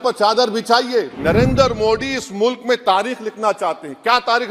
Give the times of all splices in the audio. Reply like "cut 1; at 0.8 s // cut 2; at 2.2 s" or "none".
cut 1; at 1.1 s